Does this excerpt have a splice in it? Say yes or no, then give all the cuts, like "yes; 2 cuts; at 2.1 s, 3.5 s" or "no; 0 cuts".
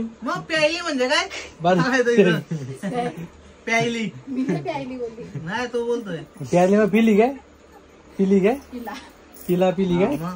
no; 0 cuts